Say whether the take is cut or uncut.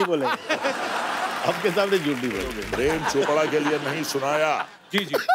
cut